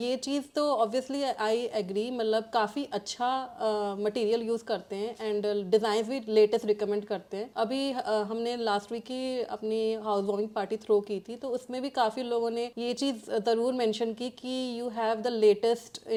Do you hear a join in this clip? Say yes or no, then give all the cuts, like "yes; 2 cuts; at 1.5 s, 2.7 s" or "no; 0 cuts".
no; 0 cuts